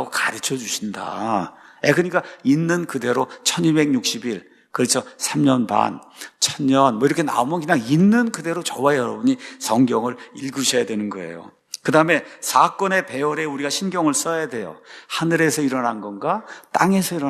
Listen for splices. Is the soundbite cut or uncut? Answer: uncut